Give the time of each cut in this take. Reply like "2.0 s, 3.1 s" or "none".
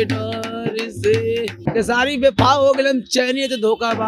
1.6 s